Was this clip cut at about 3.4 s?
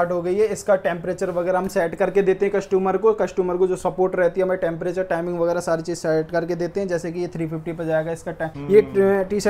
no; 1 cut; at 8.5 s

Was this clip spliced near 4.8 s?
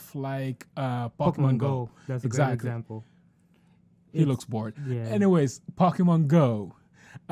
yes; 1 cut; at 4.8 s

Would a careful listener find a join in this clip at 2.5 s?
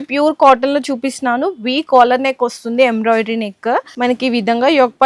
no; 1 cut; at 3.9 s

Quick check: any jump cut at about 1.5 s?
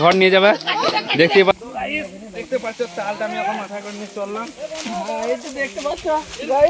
yes; 1 cut; at 1.5 s

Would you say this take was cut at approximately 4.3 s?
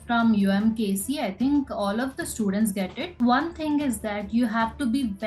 no; 1 cut; at 3.0 s

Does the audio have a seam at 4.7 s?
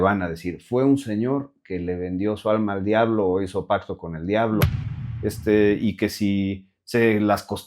yes; 1 cut; at 4.7 s

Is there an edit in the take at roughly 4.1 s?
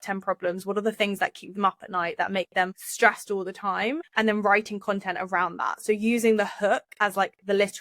yes; 2 cuts; at 2.8 s, 4.1 s

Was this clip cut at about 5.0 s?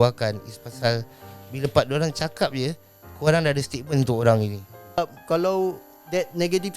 yes; 1 cut; at 5.0 s

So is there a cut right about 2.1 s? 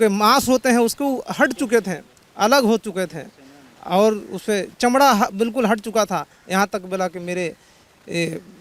no; 0 cuts

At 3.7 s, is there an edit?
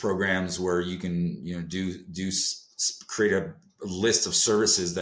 no; 0 cuts

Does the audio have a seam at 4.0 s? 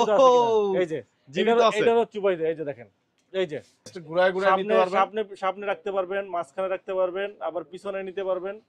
yes; 1 cut; at 4.0 s

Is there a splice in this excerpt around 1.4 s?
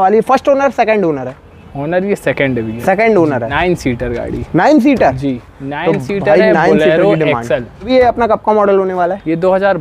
no; 2 cuts; at 3.5 s, 7.9 s

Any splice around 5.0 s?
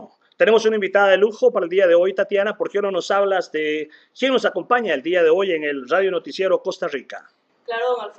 no; 1 cut; at 3.4 s

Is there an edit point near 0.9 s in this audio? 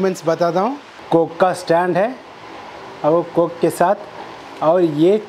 yes; 1 cut; at 0.9 s

